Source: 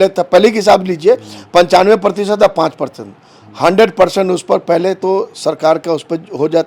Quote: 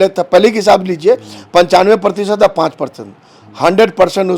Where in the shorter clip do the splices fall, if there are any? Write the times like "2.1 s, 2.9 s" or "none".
none